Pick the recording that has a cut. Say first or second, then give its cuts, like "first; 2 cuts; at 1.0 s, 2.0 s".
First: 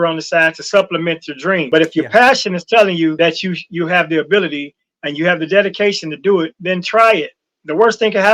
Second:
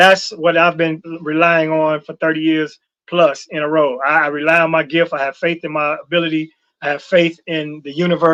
first; 2 cuts; at 1.7 s, 3.1 s